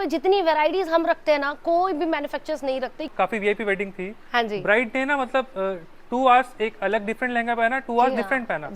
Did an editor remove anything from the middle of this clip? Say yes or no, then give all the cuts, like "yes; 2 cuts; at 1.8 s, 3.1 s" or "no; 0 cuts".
yes; 1 cut; at 3.1 s